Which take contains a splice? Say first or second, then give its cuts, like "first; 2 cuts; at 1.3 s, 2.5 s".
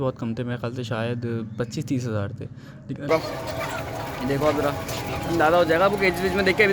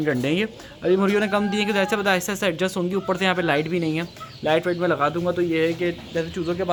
first; 1 cut; at 3.1 s